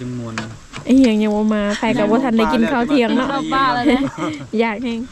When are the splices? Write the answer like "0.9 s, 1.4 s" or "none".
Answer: none